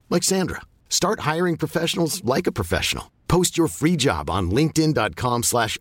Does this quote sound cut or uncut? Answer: uncut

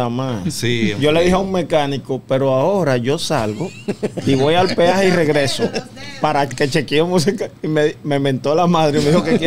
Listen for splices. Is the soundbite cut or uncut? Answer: uncut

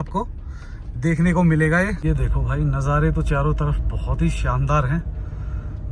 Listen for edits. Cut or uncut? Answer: cut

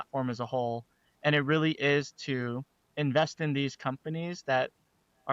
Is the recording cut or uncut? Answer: uncut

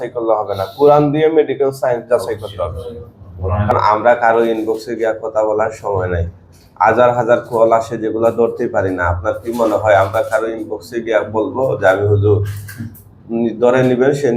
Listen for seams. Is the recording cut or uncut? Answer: cut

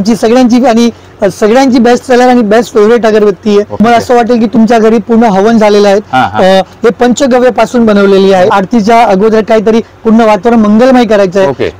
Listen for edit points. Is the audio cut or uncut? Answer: cut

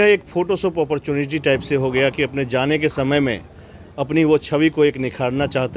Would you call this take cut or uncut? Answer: uncut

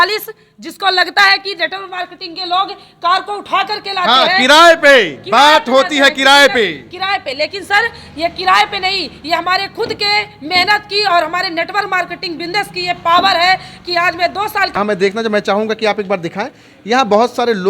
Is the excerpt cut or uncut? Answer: cut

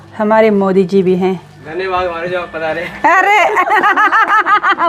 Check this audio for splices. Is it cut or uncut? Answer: cut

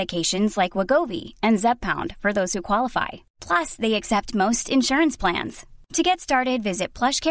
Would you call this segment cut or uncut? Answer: uncut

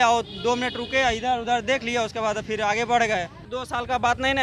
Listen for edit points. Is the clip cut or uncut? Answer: cut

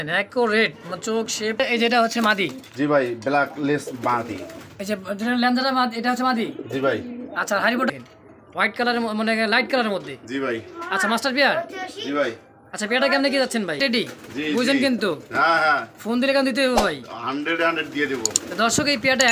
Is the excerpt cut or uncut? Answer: cut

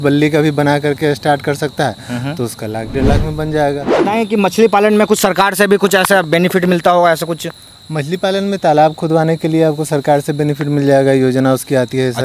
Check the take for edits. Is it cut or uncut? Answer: cut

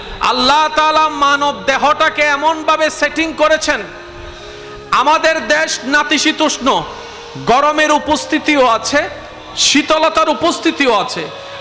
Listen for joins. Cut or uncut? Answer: uncut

